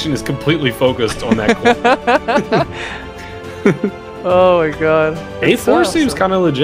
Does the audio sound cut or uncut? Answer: cut